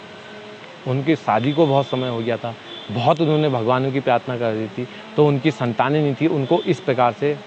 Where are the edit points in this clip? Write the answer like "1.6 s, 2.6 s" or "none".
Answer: none